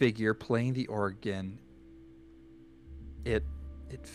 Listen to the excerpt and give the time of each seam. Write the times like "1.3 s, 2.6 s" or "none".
none